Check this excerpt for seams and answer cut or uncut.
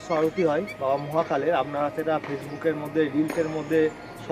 uncut